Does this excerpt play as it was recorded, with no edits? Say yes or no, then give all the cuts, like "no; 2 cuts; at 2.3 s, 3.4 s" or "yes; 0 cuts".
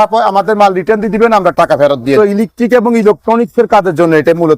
no; 1 cut; at 2.2 s